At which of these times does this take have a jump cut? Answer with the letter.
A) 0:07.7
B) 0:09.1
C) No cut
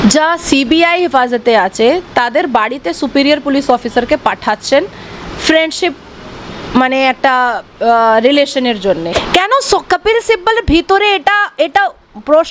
B